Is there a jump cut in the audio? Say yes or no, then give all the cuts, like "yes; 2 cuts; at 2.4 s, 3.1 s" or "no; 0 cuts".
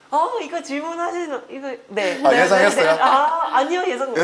no; 0 cuts